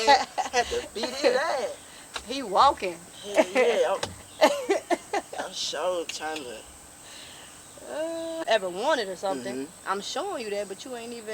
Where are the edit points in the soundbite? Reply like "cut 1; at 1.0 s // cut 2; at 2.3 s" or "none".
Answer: cut 1; at 8.4 s

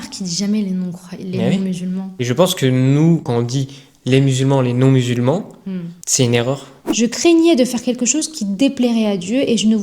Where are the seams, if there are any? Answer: cut 1; at 2.1 s // cut 2; at 3.3 s // cut 3; at 6.8 s

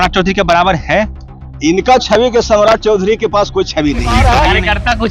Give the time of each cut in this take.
cut 1; at 4.1 s

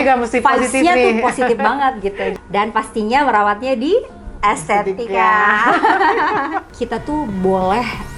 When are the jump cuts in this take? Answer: cut 1; at 2.3 s // cut 2; at 6.7 s

